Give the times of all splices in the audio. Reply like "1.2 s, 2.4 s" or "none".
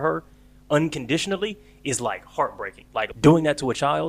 3.1 s